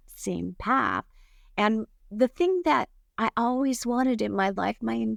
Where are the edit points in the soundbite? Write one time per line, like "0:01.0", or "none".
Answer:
none